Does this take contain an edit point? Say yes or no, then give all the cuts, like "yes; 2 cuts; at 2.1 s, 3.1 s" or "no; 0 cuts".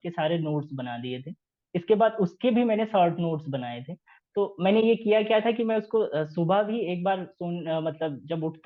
no; 0 cuts